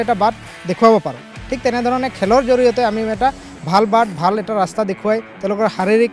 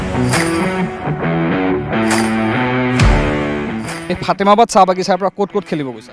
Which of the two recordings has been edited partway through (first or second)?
second